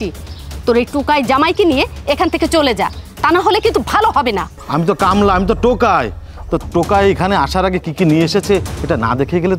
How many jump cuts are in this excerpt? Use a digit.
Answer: 1